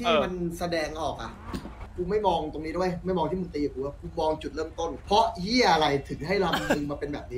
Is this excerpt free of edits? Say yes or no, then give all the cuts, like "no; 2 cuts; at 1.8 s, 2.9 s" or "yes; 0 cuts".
no; 2 cuts; at 1.9 s, 5.0 s